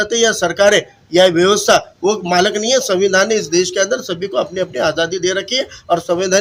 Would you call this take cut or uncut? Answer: uncut